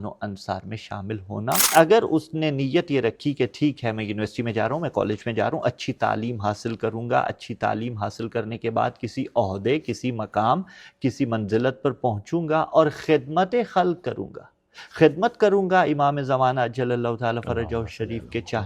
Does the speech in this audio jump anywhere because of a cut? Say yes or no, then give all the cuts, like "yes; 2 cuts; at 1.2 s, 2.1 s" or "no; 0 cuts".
yes; 1 cut; at 1.7 s